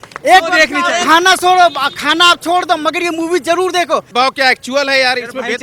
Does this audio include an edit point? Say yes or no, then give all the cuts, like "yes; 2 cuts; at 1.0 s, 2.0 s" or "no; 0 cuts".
yes; 1 cut; at 4.1 s